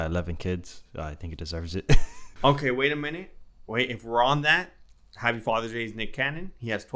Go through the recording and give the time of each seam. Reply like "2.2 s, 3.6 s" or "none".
2.3 s